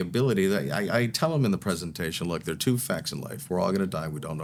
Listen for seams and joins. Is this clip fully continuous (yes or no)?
yes